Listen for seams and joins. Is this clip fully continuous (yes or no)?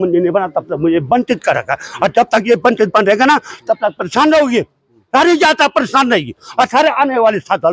yes